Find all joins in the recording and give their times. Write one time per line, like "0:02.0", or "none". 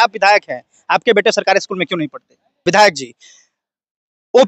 0:02.6